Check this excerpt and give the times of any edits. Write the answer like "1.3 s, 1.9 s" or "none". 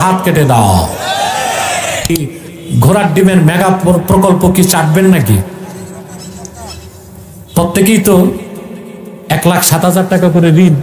2.3 s